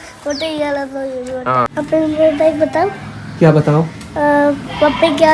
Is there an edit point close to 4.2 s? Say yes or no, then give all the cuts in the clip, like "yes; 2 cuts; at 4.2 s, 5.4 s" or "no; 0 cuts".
no; 1 cut; at 1.9 s